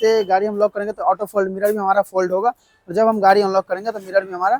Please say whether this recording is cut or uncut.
uncut